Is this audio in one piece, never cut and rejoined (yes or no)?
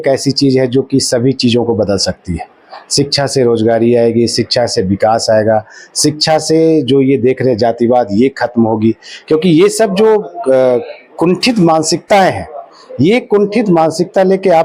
yes